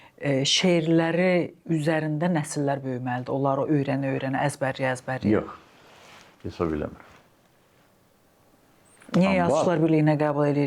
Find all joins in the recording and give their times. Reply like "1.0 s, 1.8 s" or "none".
none